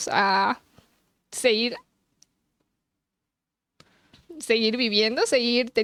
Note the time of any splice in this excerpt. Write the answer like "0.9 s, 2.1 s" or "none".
none